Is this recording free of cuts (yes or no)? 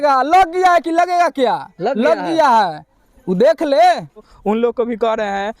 no